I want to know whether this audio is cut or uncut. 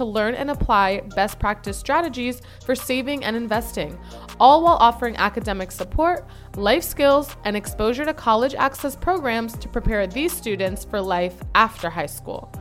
uncut